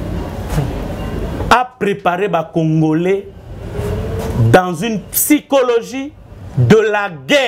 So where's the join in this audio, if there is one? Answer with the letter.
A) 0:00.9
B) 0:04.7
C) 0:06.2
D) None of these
D